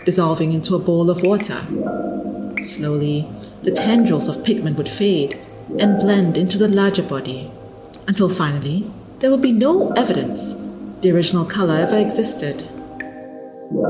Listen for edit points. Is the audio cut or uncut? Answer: cut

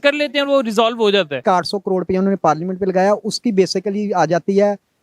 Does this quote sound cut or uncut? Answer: cut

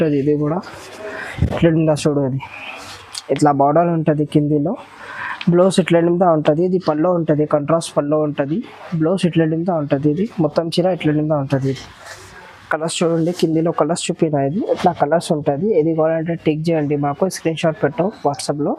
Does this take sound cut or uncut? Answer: uncut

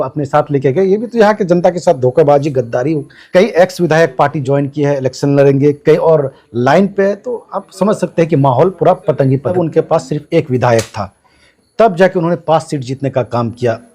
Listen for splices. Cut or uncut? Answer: cut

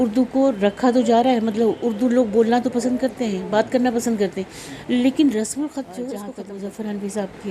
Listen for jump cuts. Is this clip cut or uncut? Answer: cut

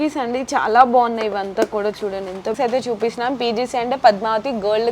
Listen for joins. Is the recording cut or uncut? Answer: cut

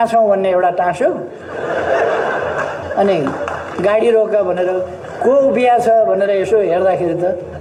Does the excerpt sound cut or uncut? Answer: uncut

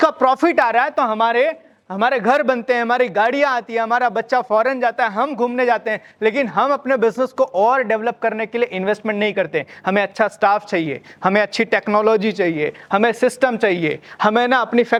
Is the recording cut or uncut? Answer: uncut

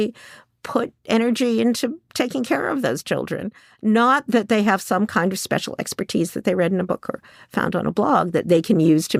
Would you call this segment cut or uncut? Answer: uncut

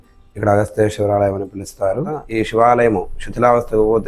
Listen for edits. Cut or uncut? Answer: cut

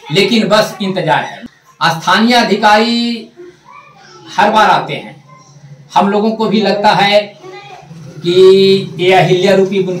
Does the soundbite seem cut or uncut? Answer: cut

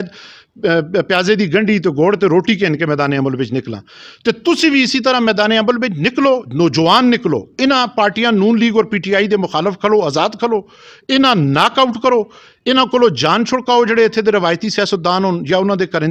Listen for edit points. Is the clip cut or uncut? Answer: uncut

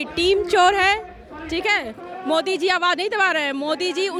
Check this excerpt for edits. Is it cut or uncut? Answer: uncut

